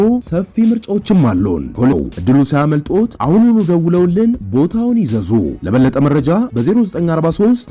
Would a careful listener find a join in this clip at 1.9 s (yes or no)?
yes